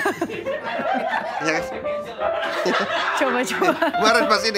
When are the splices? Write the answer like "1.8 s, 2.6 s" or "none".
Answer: none